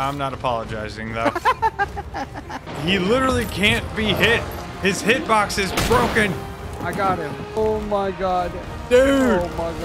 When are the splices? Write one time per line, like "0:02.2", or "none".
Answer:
0:02.7
0:07.6